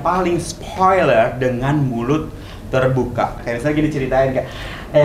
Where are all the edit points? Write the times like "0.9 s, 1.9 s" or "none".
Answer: 3.4 s